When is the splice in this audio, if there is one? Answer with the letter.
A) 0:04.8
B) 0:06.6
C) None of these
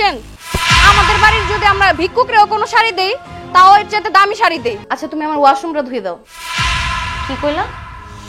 A